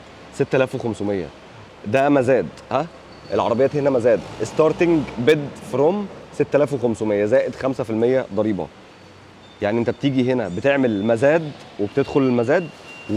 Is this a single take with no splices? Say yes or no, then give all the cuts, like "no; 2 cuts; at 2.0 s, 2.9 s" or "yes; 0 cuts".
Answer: yes; 0 cuts